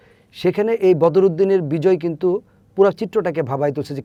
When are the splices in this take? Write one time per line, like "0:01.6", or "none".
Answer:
none